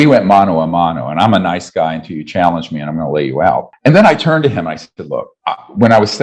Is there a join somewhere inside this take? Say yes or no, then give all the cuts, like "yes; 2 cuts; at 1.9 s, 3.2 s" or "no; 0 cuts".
yes; 2 cuts; at 3.7 s, 5.3 s